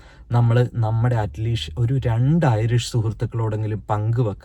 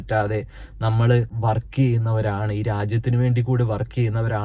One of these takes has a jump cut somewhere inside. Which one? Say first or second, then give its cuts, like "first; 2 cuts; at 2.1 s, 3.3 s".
second; 1 cut; at 1.3 s